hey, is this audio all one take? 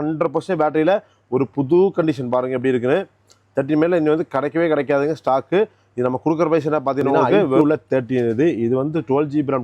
no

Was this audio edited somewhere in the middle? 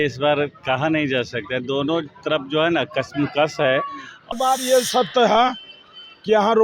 yes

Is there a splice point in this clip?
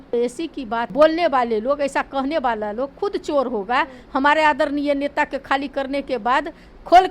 yes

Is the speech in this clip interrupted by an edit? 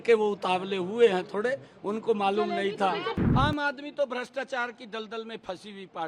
yes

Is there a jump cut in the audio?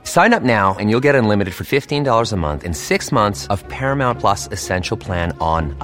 no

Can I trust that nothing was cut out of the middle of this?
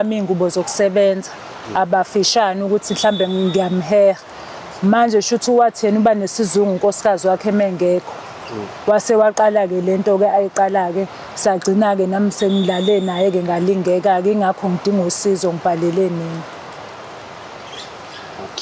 yes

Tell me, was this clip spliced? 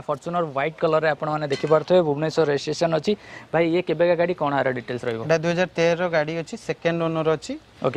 no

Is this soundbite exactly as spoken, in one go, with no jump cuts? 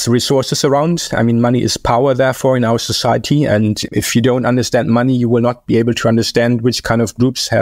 yes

